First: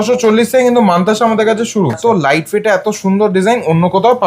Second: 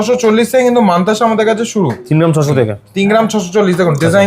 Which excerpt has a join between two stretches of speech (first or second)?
first